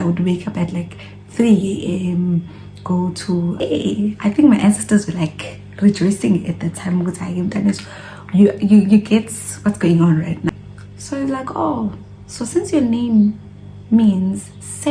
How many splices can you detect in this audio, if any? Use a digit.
2